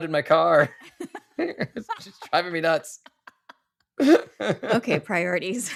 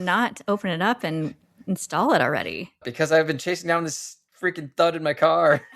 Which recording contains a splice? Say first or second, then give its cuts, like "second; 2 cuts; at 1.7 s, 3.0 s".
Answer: second; 1 cut; at 2.8 s